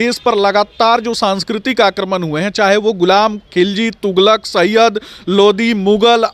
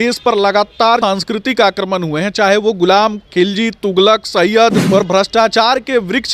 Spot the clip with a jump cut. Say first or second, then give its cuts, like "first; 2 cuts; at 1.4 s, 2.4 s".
second; 2 cuts; at 1.0 s, 4.8 s